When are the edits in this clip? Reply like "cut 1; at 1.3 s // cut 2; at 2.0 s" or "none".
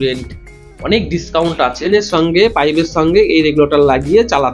cut 1; at 1.9 s